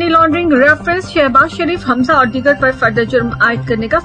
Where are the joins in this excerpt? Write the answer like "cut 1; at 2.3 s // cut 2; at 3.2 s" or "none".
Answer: none